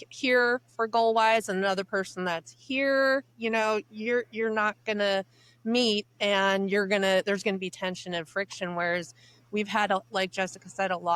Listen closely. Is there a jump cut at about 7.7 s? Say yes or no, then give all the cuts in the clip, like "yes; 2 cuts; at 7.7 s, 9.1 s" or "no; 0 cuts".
no; 0 cuts